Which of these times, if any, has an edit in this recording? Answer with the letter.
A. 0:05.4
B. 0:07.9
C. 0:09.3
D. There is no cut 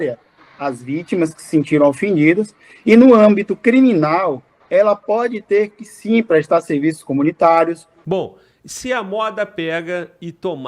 B